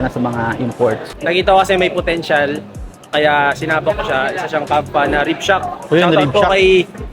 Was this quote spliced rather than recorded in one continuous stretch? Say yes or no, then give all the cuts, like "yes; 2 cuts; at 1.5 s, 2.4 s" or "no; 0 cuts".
yes; 1 cut; at 1.1 s